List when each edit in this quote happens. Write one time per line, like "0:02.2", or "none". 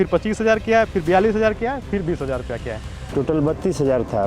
0:03.1